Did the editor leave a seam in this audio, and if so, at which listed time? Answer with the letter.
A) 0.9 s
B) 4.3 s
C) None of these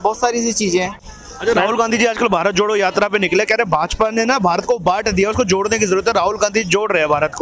A